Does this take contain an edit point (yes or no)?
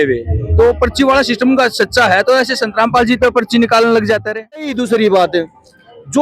yes